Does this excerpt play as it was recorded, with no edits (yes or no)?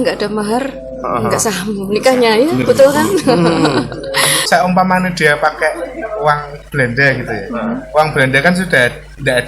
no